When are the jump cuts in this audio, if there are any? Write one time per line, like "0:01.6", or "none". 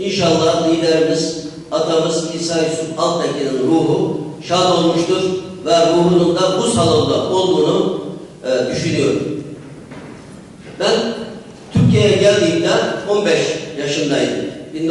none